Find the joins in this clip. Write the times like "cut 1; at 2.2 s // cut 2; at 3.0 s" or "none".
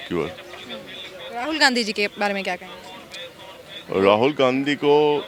none